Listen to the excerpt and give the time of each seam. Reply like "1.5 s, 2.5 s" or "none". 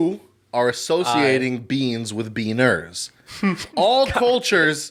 none